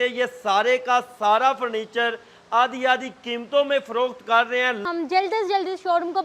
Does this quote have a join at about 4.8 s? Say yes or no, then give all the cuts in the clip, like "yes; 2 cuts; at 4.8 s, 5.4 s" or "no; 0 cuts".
yes; 1 cut; at 4.8 s